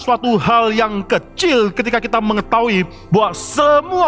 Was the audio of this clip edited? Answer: no; 0 cuts

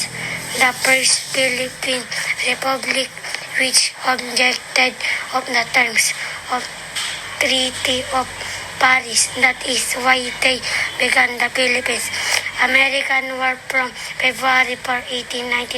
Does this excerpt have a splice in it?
yes; 1 cut; at 5.5 s

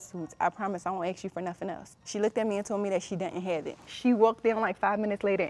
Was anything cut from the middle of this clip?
yes; 2 cuts; at 1.9 s, 3.8 s

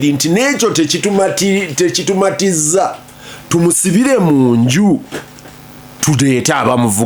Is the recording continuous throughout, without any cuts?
yes; 0 cuts

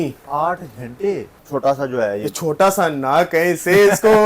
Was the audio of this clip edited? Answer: yes; 1 cut; at 1.3 s

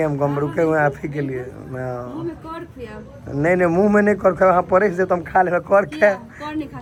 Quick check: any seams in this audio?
no; 0 cuts

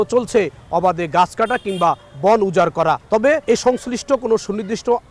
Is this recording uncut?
no; 1 cut; at 3.3 s

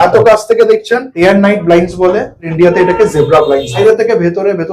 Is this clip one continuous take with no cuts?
no; 3 cuts; at 1.1 s, 2.5 s, 3.8 s

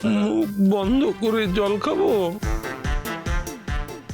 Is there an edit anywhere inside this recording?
no; 0 cuts

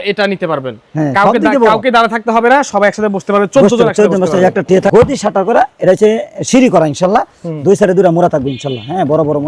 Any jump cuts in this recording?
yes; 1 cut; at 4.9 s

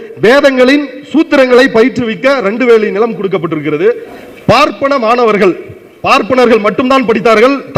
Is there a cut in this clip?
yes; 1 cut; at 4.1 s

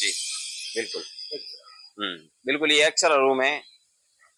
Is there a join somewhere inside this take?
no; 0 cuts

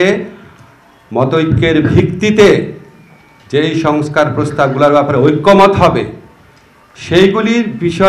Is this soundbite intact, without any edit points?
yes; 0 cuts

